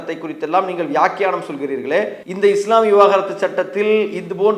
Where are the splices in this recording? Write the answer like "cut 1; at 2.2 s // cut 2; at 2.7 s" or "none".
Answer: cut 1; at 2.2 s